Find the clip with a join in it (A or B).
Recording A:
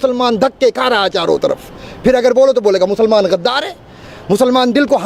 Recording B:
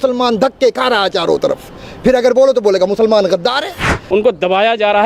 B